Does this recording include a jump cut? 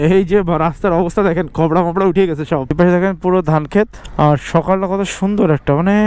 yes; 2 cuts; at 2.7 s, 4.0 s

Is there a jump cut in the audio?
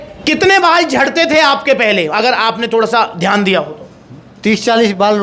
no; 0 cuts

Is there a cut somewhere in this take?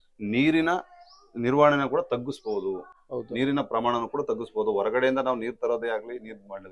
no; 0 cuts

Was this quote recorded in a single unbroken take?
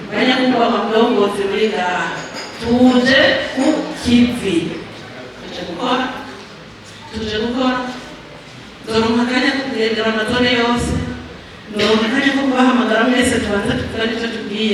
no; 1 cut; at 5.3 s

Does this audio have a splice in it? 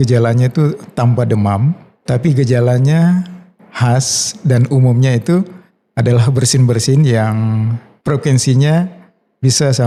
no; 0 cuts

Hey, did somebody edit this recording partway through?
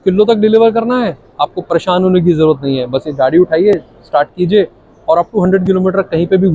no; 0 cuts

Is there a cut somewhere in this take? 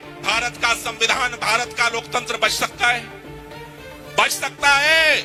no; 0 cuts

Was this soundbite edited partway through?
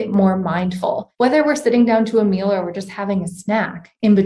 yes; 1 cut; at 1.1 s

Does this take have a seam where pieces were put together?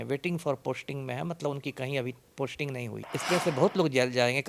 yes; 1 cut; at 3.1 s

